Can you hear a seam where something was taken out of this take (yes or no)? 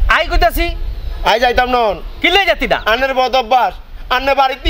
no